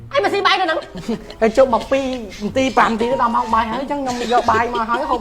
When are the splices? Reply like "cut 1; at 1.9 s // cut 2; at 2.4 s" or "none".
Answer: none